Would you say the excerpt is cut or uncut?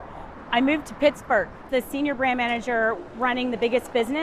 cut